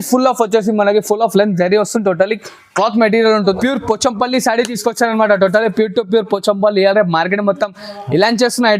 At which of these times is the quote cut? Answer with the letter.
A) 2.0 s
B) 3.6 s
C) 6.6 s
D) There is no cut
B